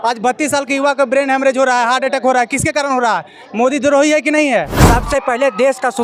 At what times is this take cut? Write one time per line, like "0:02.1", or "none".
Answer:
0:04.7